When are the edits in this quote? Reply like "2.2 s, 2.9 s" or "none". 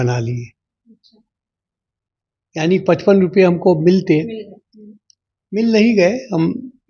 none